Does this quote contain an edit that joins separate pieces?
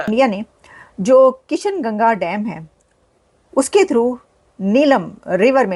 no; 0 cuts

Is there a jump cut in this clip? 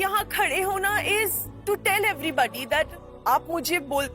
yes; 1 cut; at 1.5 s

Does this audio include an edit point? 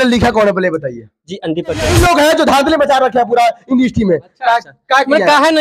yes; 1 cut; at 1.9 s

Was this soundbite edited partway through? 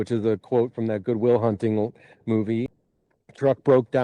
yes; 1 cut; at 2.7 s

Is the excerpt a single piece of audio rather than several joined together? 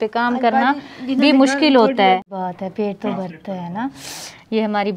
no; 1 cut; at 2.3 s

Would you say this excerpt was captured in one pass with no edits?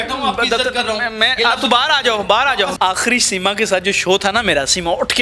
no; 1 cut; at 2.7 s

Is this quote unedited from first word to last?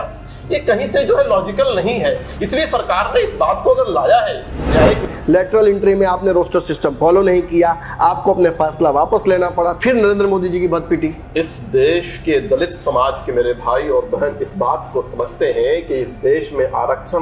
no; 1 cut; at 5.0 s

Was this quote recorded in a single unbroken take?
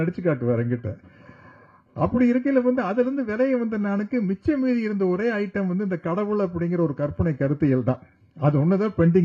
yes; 0 cuts

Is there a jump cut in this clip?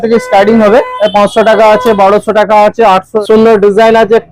yes; 2 cuts; at 0.9 s, 3.1 s

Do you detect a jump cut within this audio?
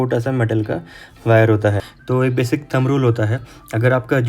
yes; 1 cut; at 1.9 s

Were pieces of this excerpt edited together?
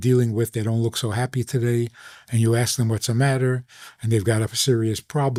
no; 0 cuts

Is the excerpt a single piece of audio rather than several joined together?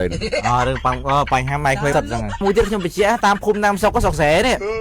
no; 1 cut; at 2.4 s

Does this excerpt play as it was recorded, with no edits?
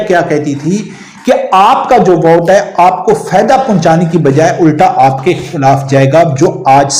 yes; 0 cuts

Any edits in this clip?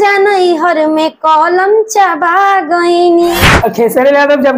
yes; 1 cut; at 3.5 s

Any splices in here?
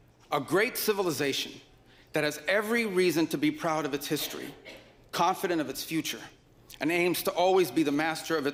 no; 0 cuts

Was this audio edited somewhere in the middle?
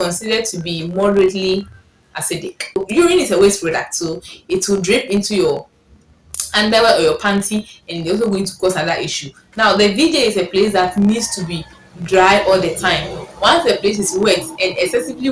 yes; 1 cut; at 2.7 s

